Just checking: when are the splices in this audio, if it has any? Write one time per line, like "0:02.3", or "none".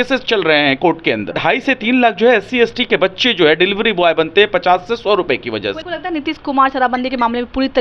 0:01.4
0:05.8